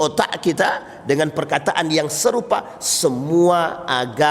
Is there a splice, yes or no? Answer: no